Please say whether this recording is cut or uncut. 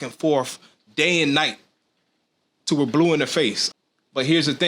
cut